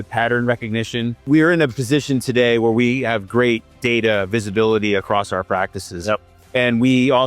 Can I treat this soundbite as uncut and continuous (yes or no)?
no